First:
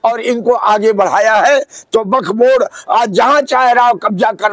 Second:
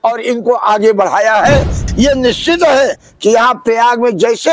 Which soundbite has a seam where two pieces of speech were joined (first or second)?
second